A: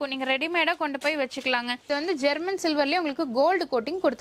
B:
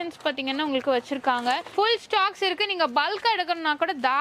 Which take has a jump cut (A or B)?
A